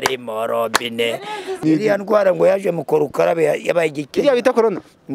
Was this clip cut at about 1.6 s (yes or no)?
yes